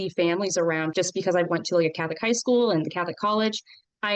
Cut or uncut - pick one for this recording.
cut